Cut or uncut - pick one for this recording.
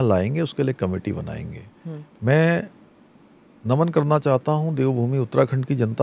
uncut